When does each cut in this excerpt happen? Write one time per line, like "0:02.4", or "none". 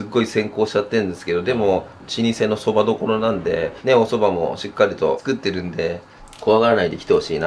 0:02.0
0:03.8
0:06.1